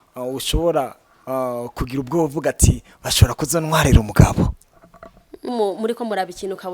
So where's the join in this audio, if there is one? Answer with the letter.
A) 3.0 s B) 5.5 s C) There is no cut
B